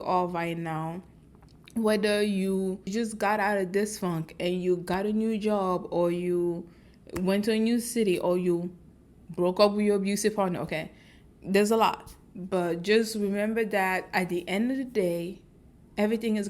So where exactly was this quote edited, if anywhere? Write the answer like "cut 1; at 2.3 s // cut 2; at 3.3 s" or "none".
cut 1; at 2.9 s

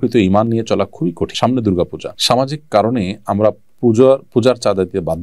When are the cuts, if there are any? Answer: cut 1; at 1.3 s // cut 2; at 2.1 s

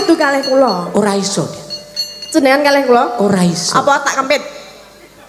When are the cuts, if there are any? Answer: none

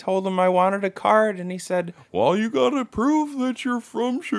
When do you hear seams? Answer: cut 1; at 2.0 s

